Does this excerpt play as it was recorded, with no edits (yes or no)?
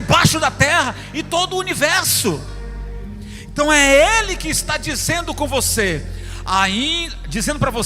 yes